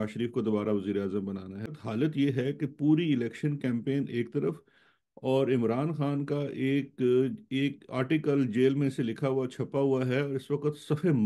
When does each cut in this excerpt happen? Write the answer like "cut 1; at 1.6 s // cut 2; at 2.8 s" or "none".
cut 1; at 1.7 s